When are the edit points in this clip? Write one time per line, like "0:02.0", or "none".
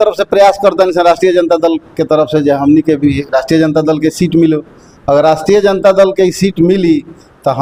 none

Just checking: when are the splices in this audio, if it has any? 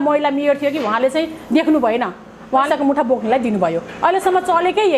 0:02.7

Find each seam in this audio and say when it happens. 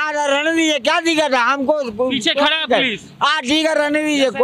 none

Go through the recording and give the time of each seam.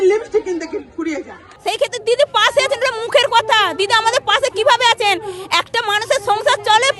0:01.4

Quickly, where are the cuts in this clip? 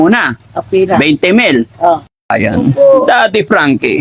0:02.1

